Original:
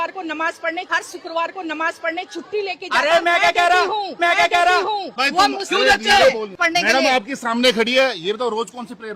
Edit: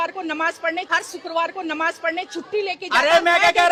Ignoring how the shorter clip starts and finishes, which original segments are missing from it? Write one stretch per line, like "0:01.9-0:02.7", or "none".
none